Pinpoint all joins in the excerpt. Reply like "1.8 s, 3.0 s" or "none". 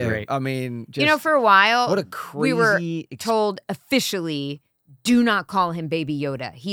none